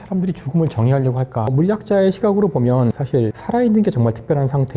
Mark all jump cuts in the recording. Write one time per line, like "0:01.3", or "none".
0:01.5